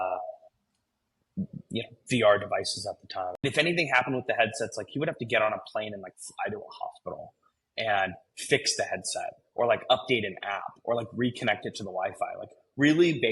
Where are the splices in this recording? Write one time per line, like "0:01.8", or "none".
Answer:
0:03.4